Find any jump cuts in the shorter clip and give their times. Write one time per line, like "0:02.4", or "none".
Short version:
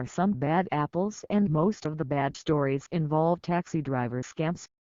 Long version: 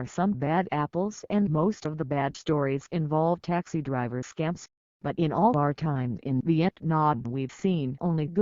none